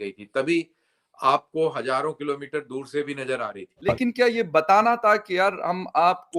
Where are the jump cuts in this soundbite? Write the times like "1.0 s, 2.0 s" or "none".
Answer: 3.9 s